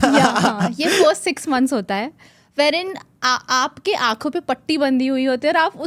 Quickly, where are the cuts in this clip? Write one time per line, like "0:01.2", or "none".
none